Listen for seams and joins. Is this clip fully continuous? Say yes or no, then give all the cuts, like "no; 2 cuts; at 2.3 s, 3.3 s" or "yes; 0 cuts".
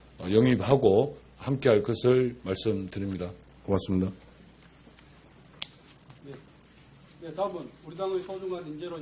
yes; 0 cuts